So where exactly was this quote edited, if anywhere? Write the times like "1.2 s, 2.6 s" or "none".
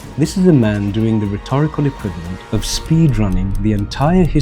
2.3 s